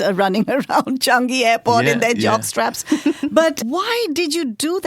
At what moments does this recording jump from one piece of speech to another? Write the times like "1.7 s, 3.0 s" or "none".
3.6 s